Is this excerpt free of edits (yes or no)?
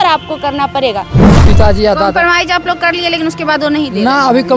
no